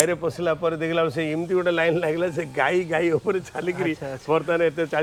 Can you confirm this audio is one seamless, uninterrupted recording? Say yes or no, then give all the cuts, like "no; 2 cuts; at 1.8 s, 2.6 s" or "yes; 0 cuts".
yes; 0 cuts